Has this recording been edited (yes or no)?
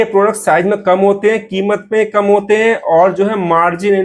no